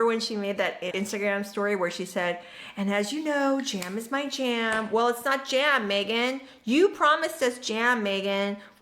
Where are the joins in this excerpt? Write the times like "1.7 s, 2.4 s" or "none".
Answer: 0.9 s